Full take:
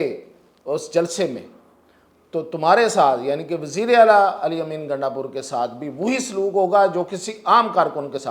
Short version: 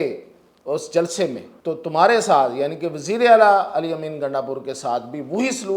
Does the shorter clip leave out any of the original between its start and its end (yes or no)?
yes